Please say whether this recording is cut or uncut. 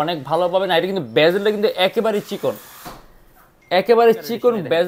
uncut